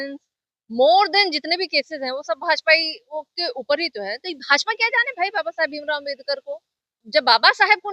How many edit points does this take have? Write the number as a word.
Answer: one